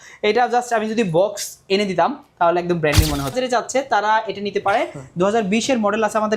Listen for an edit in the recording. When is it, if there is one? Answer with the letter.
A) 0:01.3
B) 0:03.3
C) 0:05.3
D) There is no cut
B